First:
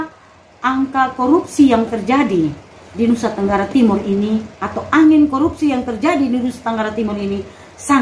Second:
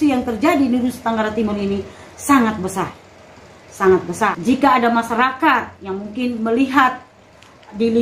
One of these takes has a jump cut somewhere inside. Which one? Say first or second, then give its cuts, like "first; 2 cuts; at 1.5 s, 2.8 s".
second; 1 cut; at 4.4 s